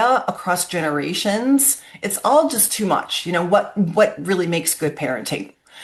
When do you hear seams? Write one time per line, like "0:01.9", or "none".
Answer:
none